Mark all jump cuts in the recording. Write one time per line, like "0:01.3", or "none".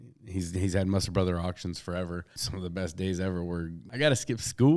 0:02.4
0:03.8